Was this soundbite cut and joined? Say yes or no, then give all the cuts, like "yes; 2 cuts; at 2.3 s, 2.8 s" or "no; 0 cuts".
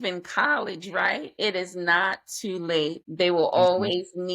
yes; 2 cuts; at 1.3 s, 3.0 s